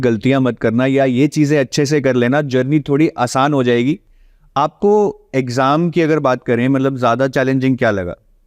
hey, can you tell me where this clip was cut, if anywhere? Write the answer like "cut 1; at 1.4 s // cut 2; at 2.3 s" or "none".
cut 1; at 4.1 s